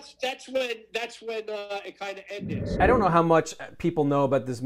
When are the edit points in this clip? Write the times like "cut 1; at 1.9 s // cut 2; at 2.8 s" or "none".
cut 1; at 2.7 s